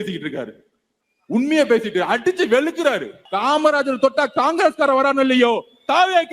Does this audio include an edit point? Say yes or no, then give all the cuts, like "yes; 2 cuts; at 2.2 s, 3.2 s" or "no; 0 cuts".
yes; 1 cut; at 3.2 s